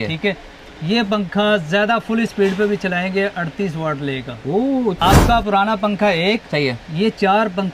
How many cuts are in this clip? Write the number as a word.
one